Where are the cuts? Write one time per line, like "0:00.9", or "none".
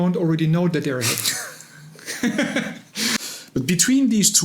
0:03.2